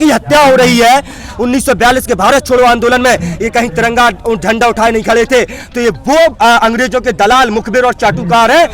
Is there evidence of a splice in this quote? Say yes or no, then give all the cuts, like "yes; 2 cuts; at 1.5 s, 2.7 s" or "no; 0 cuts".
yes; 1 cut; at 1.2 s